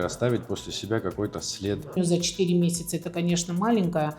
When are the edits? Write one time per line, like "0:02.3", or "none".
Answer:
0:02.0